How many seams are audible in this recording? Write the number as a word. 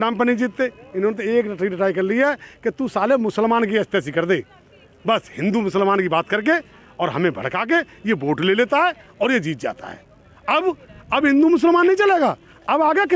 zero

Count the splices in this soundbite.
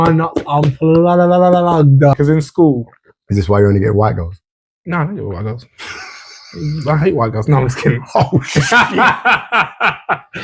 one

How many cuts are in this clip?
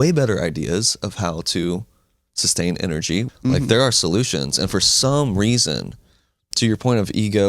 one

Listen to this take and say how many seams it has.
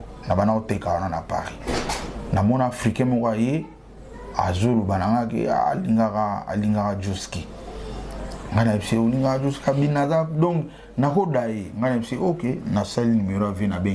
zero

